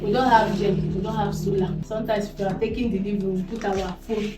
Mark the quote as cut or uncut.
cut